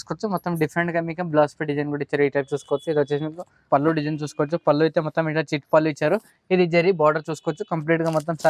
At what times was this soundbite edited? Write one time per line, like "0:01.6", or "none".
0:03.6